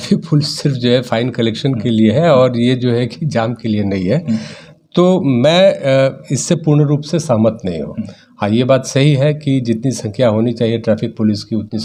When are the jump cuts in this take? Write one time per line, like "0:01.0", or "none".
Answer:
none